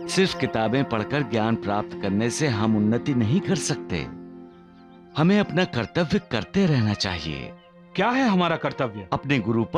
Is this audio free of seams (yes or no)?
yes